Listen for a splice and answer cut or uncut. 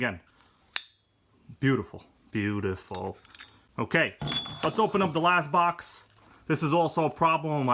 uncut